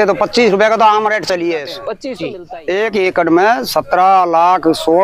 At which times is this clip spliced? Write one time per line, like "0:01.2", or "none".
0:01.8